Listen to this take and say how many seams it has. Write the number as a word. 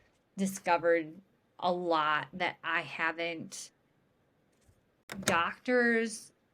one